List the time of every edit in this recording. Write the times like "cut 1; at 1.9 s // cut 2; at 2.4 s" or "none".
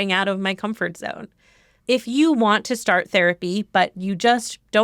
cut 1; at 1.7 s

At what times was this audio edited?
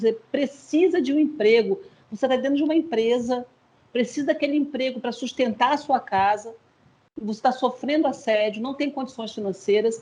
none

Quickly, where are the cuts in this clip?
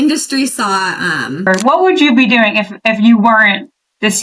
cut 1; at 1.5 s

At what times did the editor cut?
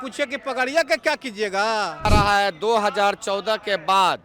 cut 1; at 2.1 s

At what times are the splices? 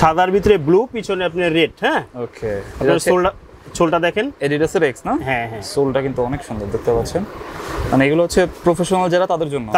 none

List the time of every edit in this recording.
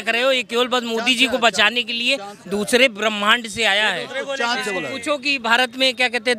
none

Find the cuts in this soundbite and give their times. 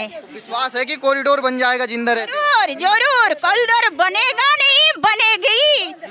none

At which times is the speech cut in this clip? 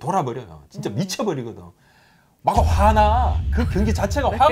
none

